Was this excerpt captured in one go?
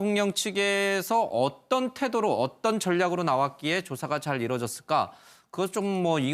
yes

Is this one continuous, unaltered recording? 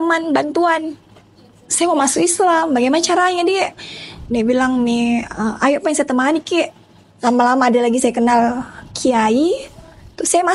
yes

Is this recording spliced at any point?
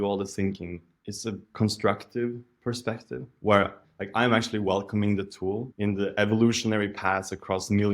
yes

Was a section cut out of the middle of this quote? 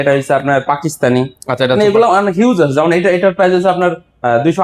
no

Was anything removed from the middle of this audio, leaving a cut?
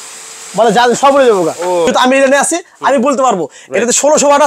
yes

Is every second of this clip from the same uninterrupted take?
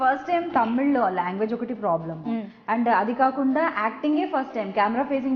yes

